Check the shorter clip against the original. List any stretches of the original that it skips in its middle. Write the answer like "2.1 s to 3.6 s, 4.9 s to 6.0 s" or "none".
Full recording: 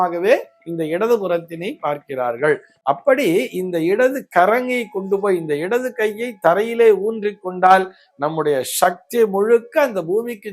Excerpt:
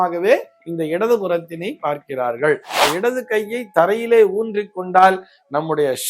2.8 s to 5.5 s